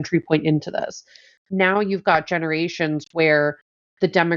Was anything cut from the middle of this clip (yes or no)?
no